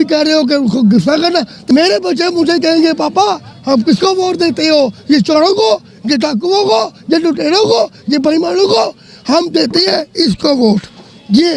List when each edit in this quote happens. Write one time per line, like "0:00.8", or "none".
0:01.5

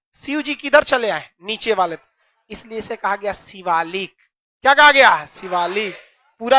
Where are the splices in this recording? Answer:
none

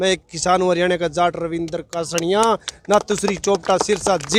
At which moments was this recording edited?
none

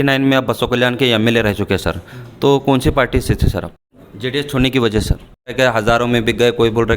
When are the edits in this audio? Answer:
0:03.8
0:05.5

